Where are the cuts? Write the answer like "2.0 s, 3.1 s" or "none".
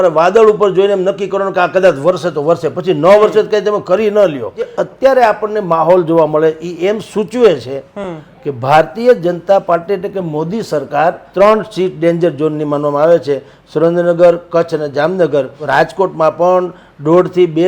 4.8 s, 11.2 s, 15.6 s